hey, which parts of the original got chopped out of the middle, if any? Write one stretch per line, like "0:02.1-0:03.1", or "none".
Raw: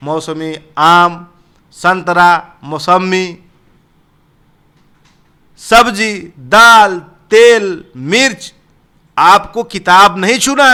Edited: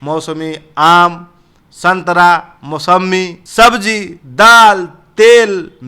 0:03.4-0:05.5